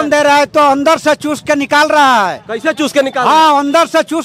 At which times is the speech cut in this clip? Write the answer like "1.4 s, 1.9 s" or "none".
none